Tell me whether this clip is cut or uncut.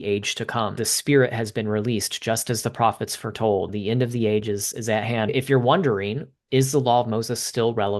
cut